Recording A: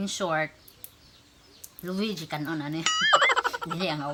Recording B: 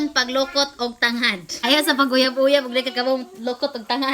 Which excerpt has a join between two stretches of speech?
B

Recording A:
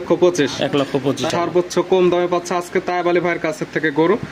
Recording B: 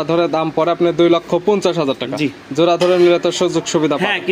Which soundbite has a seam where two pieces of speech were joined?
A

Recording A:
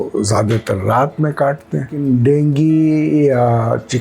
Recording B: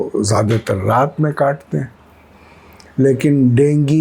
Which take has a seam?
A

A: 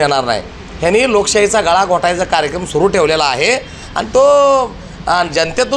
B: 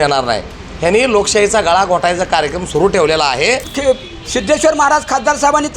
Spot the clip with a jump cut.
B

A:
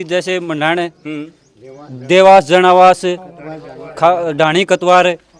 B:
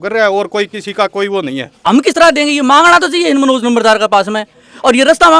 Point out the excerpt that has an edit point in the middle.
B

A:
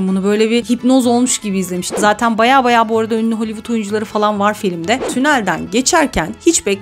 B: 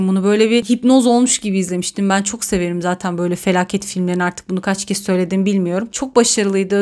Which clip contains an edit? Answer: A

